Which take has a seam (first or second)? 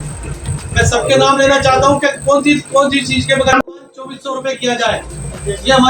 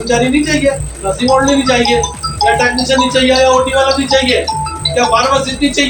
first